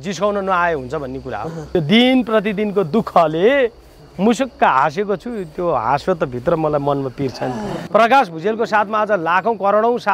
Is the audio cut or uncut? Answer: cut